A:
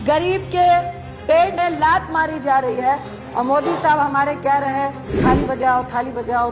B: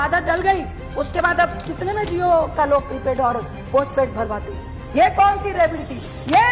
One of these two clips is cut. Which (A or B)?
A